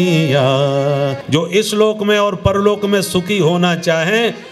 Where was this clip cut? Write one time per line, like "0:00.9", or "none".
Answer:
0:01.2

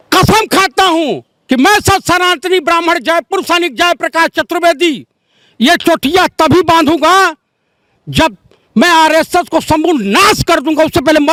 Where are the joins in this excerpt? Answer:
none

